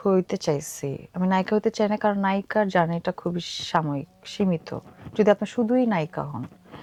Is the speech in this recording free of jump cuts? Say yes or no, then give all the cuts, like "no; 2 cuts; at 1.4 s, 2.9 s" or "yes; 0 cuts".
yes; 0 cuts